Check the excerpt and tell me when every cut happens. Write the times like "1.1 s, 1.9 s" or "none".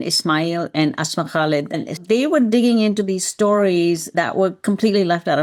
none